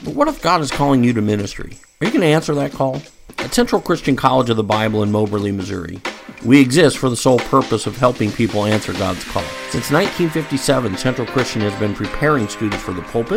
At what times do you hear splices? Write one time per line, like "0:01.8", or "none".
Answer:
none